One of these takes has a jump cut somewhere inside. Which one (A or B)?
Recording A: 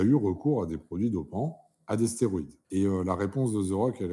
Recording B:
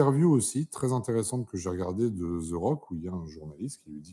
A